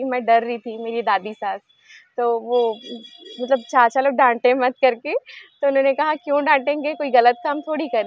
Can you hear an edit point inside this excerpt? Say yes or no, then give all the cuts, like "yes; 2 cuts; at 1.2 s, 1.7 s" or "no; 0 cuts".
no; 0 cuts